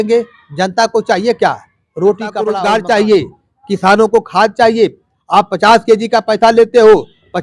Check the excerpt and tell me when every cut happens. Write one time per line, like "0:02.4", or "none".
0:02.4